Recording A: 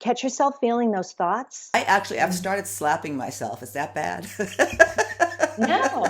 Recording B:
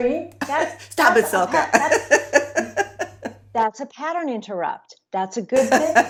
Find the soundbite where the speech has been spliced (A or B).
A